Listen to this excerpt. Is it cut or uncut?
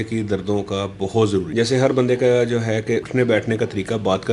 cut